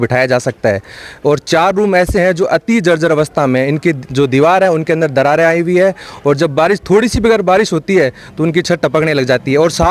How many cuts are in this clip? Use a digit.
0